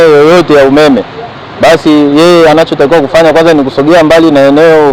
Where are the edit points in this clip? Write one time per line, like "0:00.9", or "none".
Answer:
none